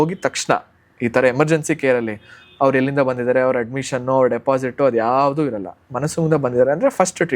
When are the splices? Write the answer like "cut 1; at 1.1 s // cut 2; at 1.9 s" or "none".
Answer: none